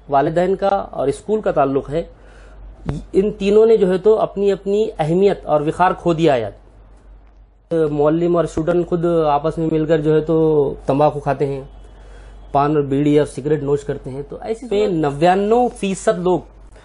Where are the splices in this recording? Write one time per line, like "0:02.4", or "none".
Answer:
0:07.7
0:14.7